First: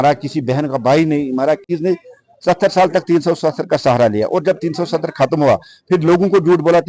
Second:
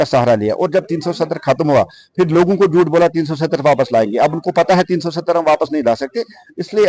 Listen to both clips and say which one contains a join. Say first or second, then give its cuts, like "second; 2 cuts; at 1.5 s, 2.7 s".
first; 1 cut; at 1.7 s